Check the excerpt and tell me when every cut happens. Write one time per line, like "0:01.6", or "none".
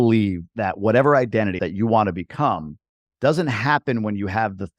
0:01.6